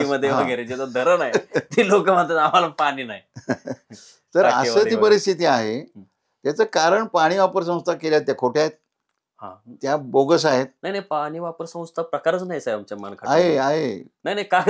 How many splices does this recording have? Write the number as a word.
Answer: zero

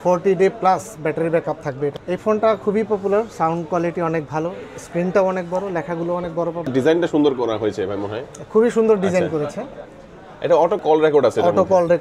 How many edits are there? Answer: three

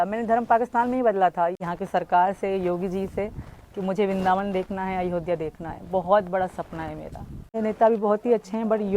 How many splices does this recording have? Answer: two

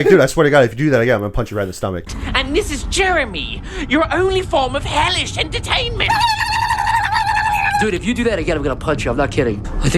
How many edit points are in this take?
one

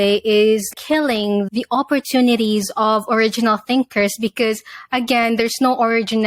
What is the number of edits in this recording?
zero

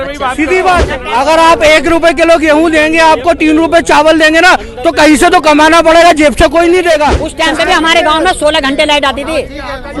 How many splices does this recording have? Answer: two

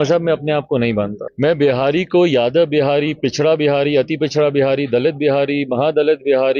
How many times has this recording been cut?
one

